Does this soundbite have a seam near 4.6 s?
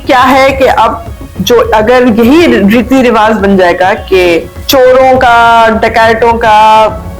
yes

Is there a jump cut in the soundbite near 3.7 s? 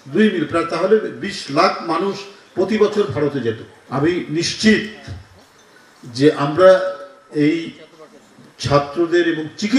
yes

